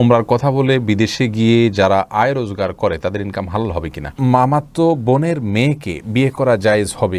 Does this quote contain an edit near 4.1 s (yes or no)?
yes